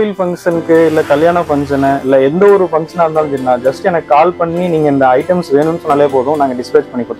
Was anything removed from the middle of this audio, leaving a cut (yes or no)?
no